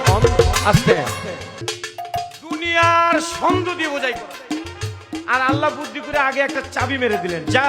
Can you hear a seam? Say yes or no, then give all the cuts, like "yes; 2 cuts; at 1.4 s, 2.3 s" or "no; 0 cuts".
yes; 1 cut; at 1.7 s